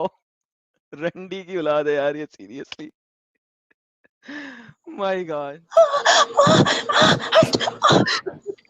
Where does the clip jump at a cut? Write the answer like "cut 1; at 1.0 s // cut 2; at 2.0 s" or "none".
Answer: cut 1; at 5.6 s